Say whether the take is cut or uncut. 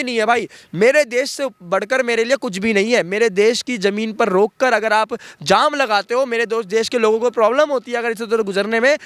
uncut